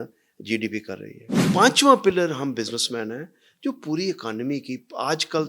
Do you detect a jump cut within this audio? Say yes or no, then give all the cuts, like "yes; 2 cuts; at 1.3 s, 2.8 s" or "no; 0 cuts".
yes; 1 cut; at 1.4 s